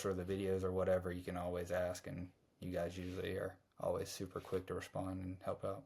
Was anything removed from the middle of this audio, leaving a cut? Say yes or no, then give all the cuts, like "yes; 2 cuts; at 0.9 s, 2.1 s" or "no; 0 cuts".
no; 0 cuts